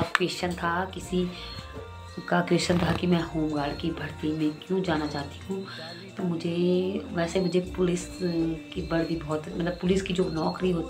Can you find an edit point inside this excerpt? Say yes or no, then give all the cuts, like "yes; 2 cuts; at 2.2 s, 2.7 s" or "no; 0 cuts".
no; 0 cuts